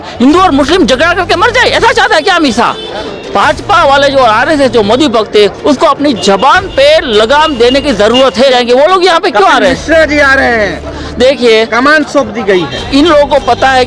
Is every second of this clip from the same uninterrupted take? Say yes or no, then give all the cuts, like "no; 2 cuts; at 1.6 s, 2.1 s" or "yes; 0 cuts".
no; 2 cuts; at 3.1 s, 8.5 s